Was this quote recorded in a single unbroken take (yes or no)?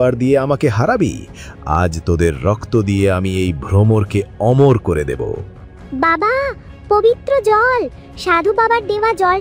yes